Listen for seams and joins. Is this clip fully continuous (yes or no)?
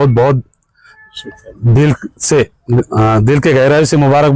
yes